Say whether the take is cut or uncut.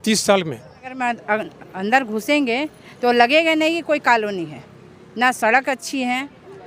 cut